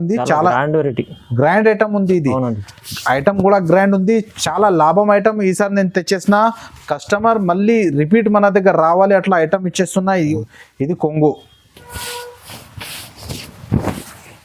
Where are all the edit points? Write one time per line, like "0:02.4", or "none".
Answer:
0:10.4